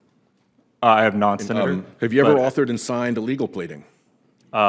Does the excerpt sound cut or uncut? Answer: cut